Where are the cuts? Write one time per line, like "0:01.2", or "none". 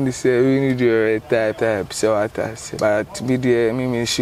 0:01.6
0:02.7